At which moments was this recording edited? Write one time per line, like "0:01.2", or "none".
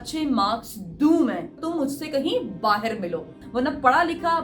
0:01.5
0:03.4